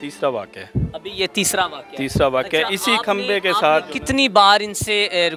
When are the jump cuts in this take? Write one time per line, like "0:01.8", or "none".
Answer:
none

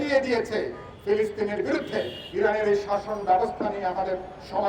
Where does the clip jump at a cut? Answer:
0:02.2

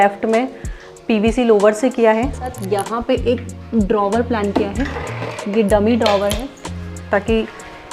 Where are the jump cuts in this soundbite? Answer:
0:02.5

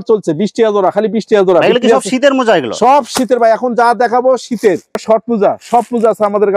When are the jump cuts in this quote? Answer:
0:04.9

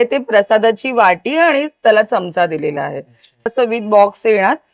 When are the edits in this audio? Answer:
0:03.5

